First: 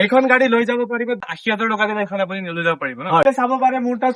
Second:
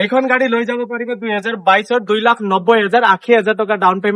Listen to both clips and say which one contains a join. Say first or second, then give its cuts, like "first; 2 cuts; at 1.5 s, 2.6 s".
first; 2 cuts; at 1.3 s, 3.2 s